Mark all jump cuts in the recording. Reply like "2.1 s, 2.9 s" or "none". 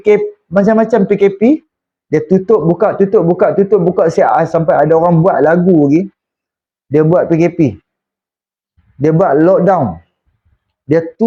none